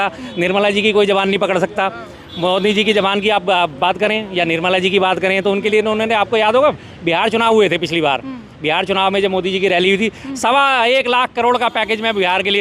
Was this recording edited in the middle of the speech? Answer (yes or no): no